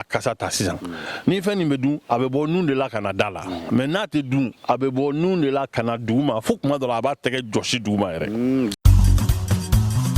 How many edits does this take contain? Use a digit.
1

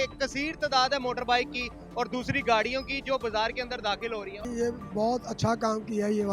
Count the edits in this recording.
1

